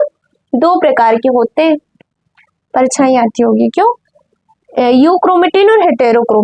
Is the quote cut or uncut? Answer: uncut